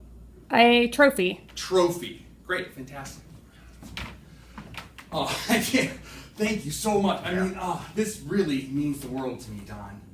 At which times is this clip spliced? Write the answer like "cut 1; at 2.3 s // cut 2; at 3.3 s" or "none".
cut 1; at 6.2 s